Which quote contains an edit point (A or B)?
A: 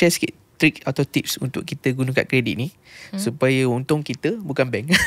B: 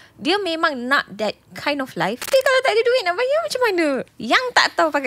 B